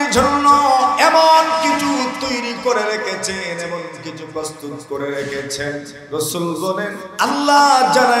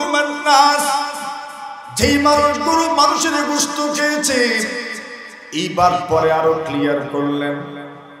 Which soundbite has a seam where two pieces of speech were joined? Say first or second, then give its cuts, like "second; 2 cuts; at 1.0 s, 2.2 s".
first; 2 cuts; at 6.0 s, 7.0 s